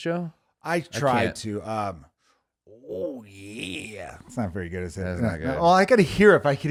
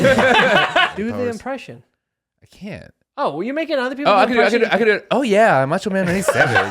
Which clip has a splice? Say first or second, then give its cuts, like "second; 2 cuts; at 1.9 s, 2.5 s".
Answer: second; 1 cut; at 0.9 s